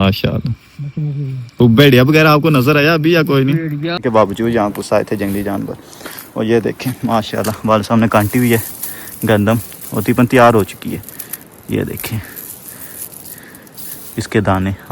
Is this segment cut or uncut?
cut